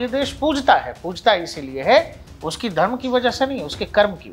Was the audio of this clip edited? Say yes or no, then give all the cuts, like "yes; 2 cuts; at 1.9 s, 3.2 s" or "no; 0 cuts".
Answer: no; 0 cuts